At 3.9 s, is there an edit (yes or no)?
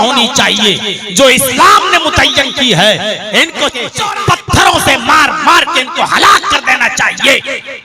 yes